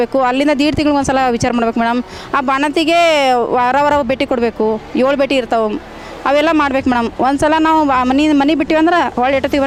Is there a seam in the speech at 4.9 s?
no; 0 cuts

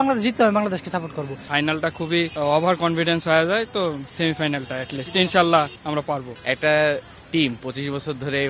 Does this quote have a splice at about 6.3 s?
yes; 2 cuts; at 1.4 s, 6.3 s

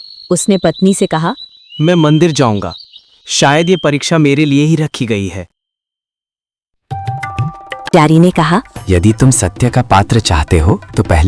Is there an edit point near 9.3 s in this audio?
no; 1 cut; at 7.9 s

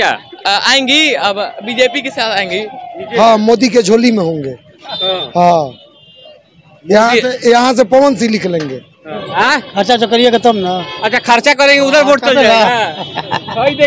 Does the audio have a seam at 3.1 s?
yes; 2 cuts; at 3.1 s, 9.1 s

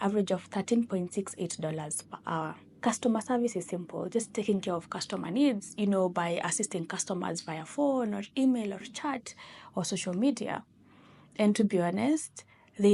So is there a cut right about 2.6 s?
no; 0 cuts

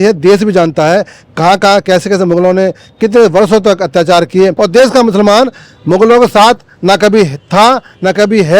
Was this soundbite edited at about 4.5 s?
yes; 1 cut; at 4.5 s

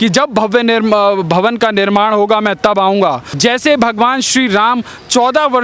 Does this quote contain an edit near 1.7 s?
no; 1 cut; at 3.3 s

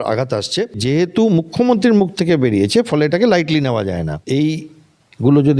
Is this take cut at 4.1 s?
yes; 2 cuts; at 0.8 s, 4.1 s

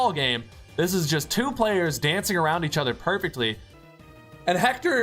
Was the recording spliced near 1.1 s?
no; 1 cut; at 3.7 s

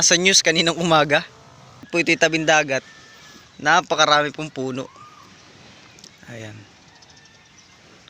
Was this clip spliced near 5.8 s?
no; 1 cut; at 1.9 s

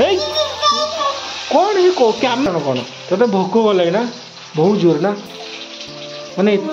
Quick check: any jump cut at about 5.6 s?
no; 1 cut; at 2.4 s

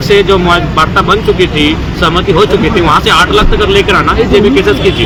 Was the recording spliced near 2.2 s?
no; 0 cuts

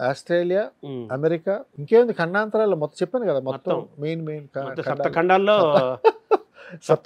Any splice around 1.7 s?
yes; 1 cut; at 1.7 s

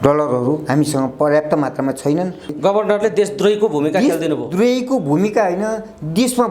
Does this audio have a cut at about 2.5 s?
yes; 1 cut; at 2.5 s

